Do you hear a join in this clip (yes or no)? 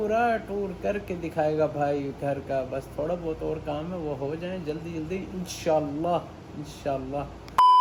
no